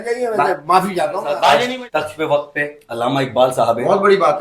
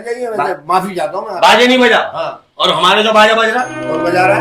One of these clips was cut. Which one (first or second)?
first